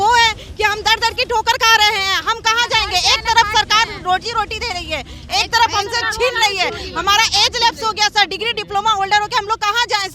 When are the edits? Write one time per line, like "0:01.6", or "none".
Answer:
none